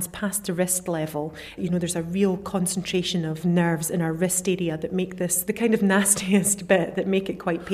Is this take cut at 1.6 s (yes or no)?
yes